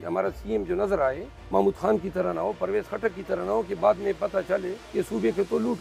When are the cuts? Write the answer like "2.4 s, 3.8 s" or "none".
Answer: 1.3 s, 4.8 s